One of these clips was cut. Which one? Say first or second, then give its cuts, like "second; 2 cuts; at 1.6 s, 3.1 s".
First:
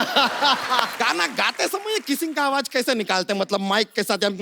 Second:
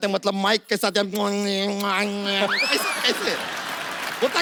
first; 1 cut; at 0.9 s